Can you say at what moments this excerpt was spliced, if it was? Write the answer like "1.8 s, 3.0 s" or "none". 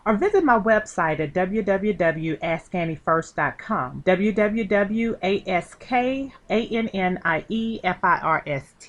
3.9 s